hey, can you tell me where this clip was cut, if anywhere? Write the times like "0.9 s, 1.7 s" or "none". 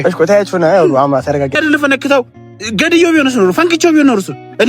1.5 s